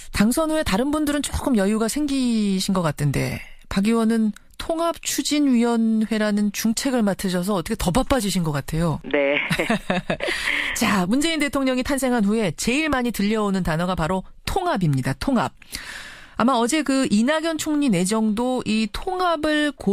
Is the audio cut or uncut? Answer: cut